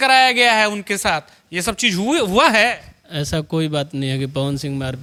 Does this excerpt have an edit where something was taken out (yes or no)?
no